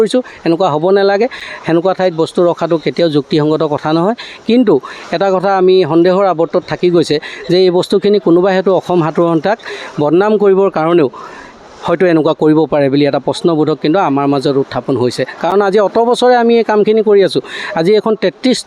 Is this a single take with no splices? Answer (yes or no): yes